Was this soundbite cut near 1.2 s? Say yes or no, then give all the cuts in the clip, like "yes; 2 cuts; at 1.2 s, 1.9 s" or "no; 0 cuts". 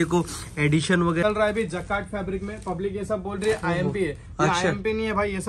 yes; 1 cut; at 1.2 s